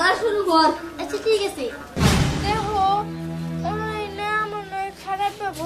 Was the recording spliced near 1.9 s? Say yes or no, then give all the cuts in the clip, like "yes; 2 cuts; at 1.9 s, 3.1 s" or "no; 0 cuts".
yes; 1 cut; at 1.9 s